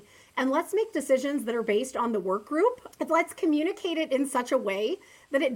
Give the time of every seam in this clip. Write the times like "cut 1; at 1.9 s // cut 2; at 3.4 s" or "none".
cut 1; at 2.8 s